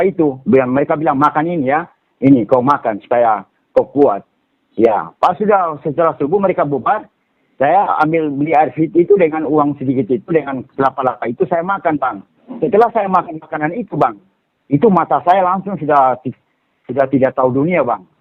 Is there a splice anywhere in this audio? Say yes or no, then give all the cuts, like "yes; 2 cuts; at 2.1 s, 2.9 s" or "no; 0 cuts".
no; 0 cuts